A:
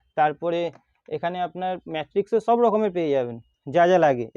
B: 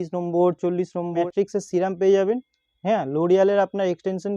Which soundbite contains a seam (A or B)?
B